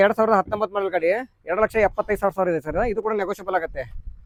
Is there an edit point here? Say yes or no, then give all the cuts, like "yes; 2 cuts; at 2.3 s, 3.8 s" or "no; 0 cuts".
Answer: no; 0 cuts